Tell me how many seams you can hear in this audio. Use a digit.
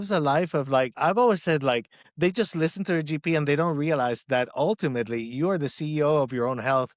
2